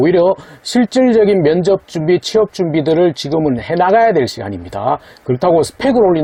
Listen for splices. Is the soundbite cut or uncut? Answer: uncut